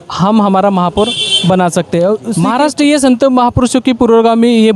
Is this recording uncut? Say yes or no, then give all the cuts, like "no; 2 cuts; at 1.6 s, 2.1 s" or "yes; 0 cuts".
no; 1 cut; at 2.3 s